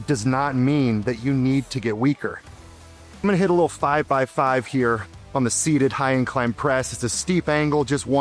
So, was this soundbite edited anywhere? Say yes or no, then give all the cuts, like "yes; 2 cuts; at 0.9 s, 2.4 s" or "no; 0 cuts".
yes; 2 cuts; at 2.7 s, 5.1 s